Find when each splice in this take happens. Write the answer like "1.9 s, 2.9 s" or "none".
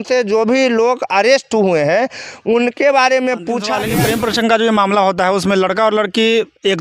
3.8 s

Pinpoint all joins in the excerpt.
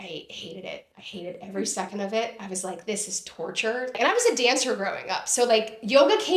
4.0 s

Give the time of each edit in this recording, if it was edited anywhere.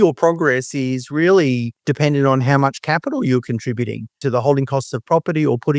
1.8 s, 4.2 s

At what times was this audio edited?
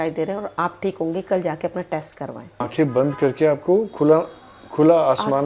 2.6 s

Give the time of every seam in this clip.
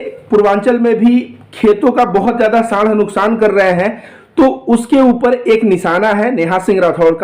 none

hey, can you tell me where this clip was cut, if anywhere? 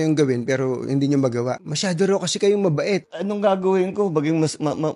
1.6 s, 3.1 s

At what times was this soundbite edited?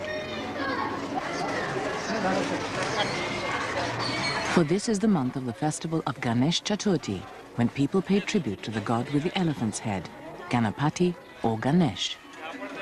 none

